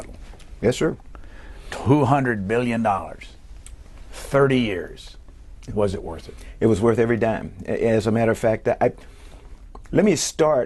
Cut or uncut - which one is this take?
cut